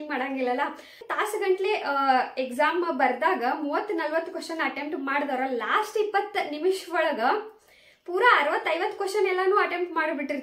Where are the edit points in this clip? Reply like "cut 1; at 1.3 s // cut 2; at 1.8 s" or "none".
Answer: cut 1; at 1.1 s

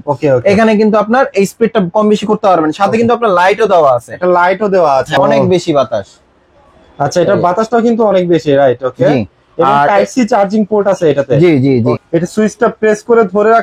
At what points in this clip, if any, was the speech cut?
cut 1; at 5.1 s // cut 2; at 12.0 s

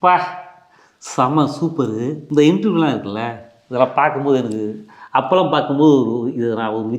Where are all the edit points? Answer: cut 1; at 2.2 s

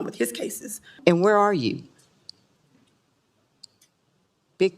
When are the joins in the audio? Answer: cut 1; at 1.0 s

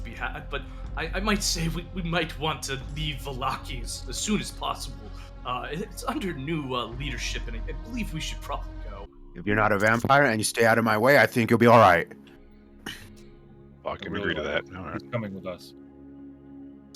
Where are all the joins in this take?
cut 1; at 9.2 s

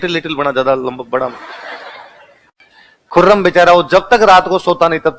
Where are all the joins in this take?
none

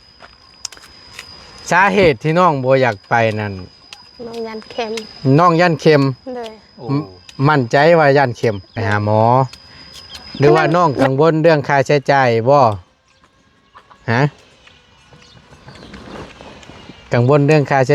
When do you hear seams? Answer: cut 1; at 8.7 s

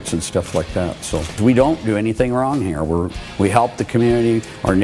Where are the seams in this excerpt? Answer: cut 1; at 1.4 s

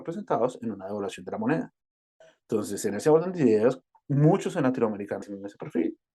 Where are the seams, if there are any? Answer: cut 1; at 5.2 s

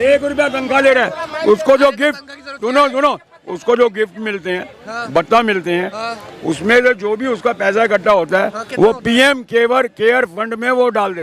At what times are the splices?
none

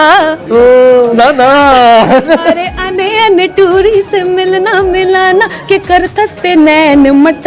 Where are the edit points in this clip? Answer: none

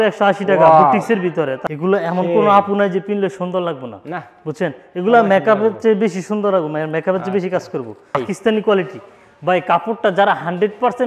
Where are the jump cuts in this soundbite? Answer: cut 1; at 1.6 s // cut 2; at 8.2 s

